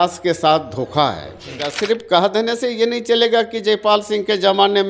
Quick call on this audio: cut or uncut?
cut